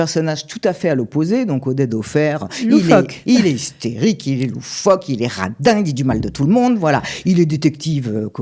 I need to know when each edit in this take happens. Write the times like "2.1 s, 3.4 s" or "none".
none